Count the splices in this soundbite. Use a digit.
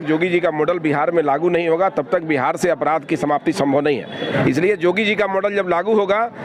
1